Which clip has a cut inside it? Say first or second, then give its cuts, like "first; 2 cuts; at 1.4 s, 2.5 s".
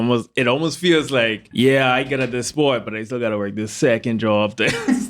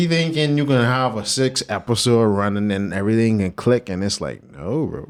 first; 1 cut; at 1.4 s